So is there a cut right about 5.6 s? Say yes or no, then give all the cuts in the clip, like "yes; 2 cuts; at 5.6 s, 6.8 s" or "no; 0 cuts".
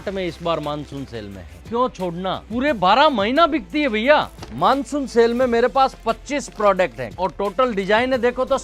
no; 3 cuts; at 1.6 s, 4.4 s, 7.0 s